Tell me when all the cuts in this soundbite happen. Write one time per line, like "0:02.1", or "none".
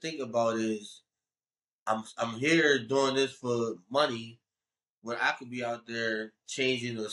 none